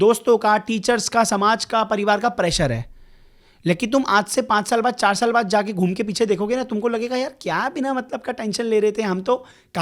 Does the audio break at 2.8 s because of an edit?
no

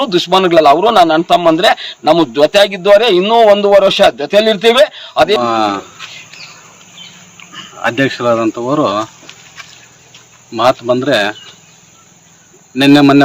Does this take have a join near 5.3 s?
yes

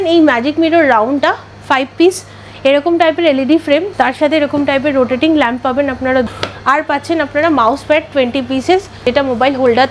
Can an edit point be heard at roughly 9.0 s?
yes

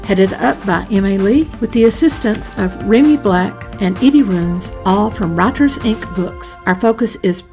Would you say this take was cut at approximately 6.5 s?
no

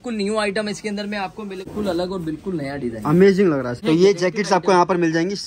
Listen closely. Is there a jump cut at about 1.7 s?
yes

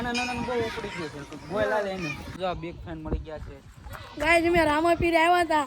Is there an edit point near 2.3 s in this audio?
yes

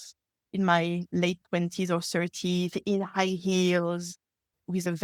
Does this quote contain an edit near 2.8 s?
no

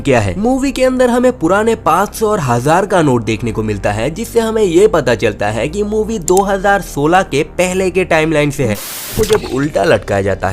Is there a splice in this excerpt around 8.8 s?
yes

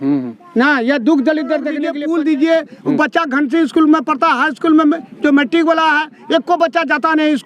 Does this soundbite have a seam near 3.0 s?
no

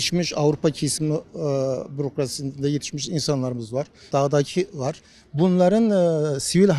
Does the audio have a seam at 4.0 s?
yes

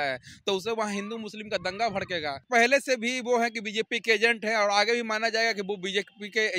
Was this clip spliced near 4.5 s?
no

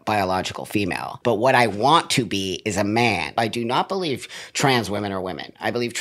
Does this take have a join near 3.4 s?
yes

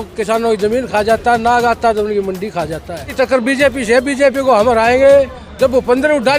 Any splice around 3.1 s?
yes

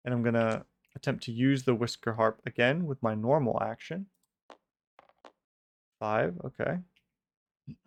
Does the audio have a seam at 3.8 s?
no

